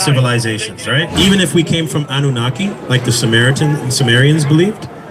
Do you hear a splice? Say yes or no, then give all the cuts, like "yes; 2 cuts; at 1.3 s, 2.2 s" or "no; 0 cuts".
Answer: yes; 1 cut; at 1.1 s